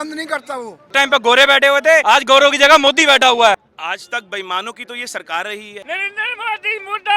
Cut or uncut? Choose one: cut